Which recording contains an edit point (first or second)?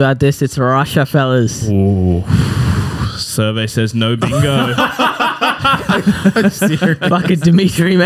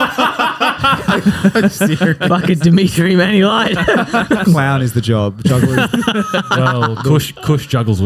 second